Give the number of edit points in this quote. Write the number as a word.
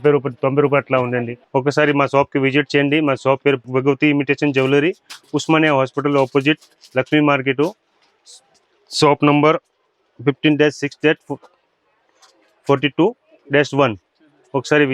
zero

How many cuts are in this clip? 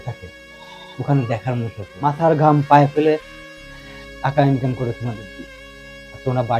one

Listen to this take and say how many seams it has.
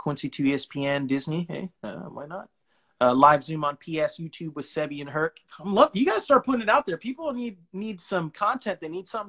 one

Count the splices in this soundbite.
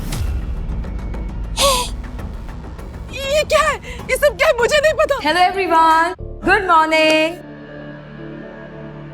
one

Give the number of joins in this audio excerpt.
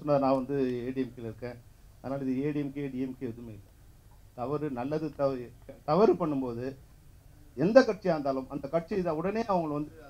zero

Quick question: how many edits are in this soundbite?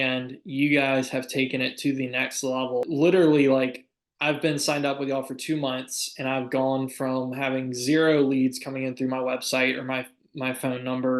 one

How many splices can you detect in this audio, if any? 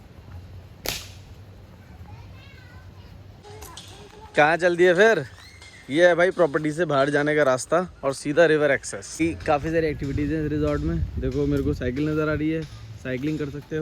two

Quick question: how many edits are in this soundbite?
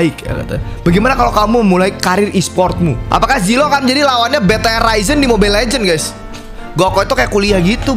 one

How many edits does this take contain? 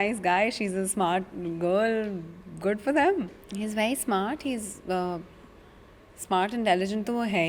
one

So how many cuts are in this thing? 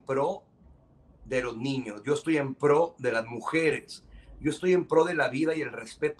zero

